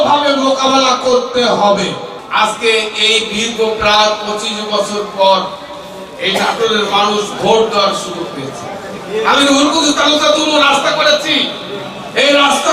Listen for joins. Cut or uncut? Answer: cut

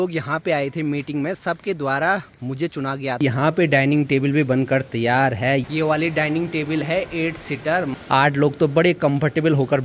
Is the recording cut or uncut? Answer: cut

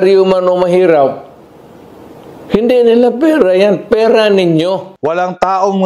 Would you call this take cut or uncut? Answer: cut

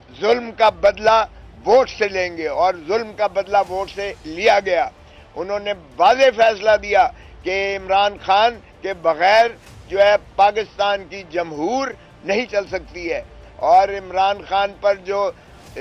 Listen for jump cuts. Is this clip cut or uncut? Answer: uncut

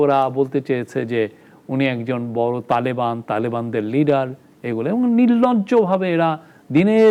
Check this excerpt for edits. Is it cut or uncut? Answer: uncut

